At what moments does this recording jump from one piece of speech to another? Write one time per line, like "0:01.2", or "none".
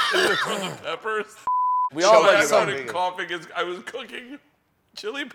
0:01.7